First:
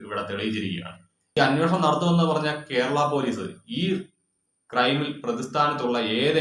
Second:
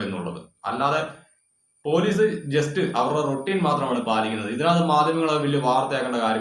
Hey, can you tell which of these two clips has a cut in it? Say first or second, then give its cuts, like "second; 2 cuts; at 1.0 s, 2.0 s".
first; 1 cut; at 1.4 s